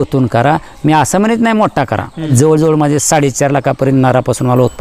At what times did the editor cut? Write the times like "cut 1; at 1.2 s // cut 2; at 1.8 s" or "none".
cut 1; at 2.3 s